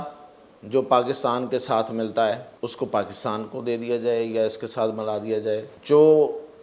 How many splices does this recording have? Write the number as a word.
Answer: two